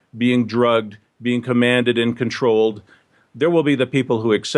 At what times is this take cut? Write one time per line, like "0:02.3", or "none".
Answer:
0:03.1